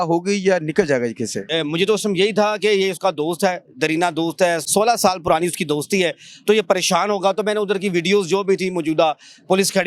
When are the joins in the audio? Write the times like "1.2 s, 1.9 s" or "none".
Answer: 1.4 s